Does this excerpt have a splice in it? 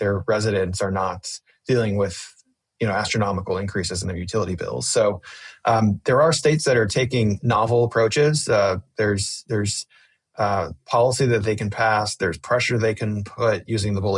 no; 0 cuts

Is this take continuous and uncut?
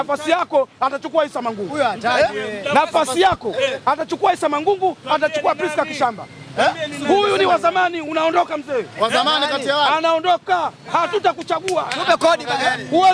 yes; 0 cuts

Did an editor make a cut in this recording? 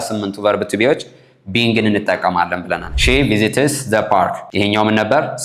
yes; 2 cuts; at 2.9 s, 4.4 s

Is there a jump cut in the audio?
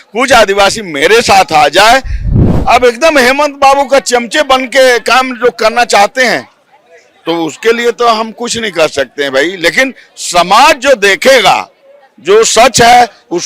yes; 1 cut; at 2.4 s

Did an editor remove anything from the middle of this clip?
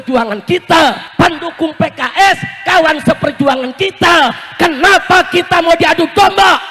yes; 1 cut; at 1.0 s

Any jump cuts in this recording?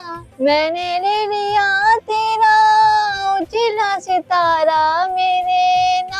no; 0 cuts

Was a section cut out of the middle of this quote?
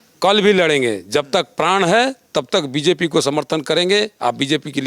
no; 0 cuts

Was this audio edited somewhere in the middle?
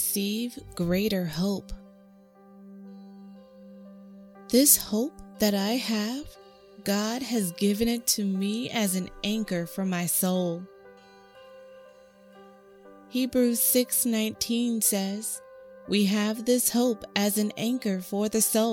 yes; 2 cuts; at 1.9 s, 3.8 s

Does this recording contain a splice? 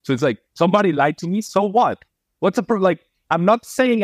no; 0 cuts

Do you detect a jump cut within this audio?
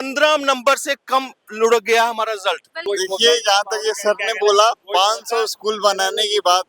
yes; 1 cut; at 2.8 s

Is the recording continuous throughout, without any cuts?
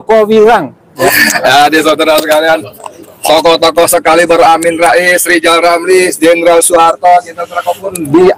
no; 1 cut; at 1.1 s

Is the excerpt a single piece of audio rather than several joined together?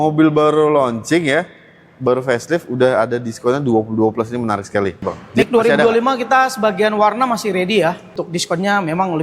no; 2 cuts; at 5.4 s, 8.1 s

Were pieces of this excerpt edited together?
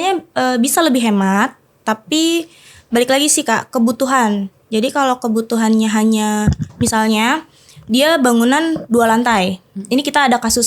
no; 0 cuts

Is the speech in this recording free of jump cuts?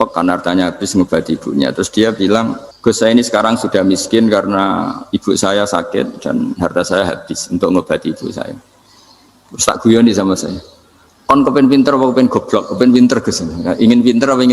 no; 1 cut; at 2.6 s

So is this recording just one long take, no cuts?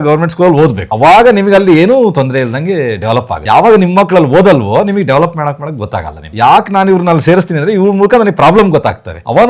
yes; 0 cuts

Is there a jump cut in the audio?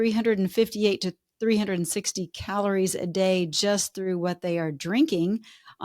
no; 0 cuts

